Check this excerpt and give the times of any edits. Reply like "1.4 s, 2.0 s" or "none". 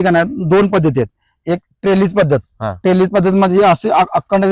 none